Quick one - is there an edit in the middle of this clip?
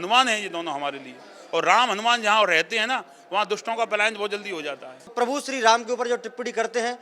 yes; 1 cut; at 5.1 s

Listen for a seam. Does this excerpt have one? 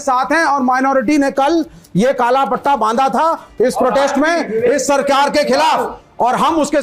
no; 0 cuts

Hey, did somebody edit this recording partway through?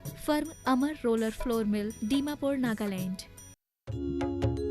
yes; 1 cut; at 3.8 s

